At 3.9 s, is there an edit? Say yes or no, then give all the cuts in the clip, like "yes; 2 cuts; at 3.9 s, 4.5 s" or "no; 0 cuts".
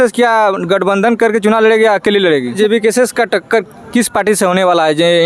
no; 1 cut; at 2.5 s